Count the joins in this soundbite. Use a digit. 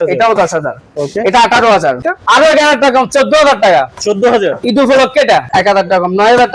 2